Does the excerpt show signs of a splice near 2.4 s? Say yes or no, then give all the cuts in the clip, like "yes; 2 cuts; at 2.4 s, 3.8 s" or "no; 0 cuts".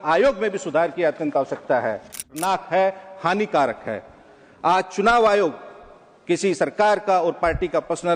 yes; 1 cut; at 2.4 s